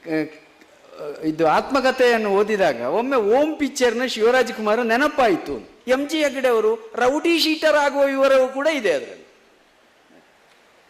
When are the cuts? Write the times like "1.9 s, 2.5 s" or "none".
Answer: 5.7 s

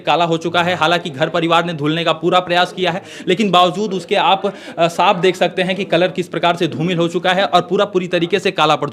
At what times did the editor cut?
none

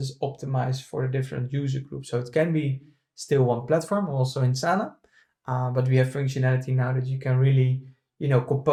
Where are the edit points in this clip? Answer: none

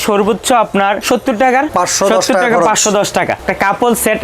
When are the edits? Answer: 1.0 s, 1.7 s, 3.4 s

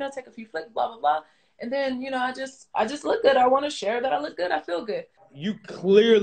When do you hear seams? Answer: 5.2 s

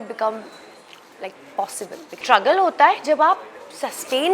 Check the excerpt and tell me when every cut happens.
2.1 s

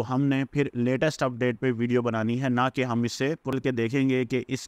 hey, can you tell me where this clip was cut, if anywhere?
3.5 s

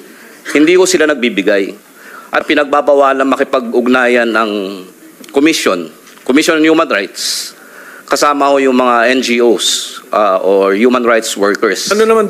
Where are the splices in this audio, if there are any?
2.4 s

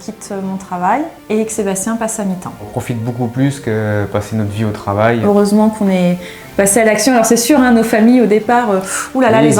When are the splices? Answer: 1.2 s, 2.7 s, 5.2 s

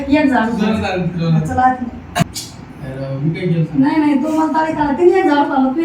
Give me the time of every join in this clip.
2.2 s

